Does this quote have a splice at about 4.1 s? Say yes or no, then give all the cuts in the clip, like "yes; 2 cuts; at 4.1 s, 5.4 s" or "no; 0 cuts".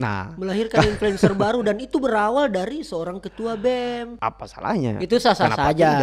yes; 1 cut; at 4.1 s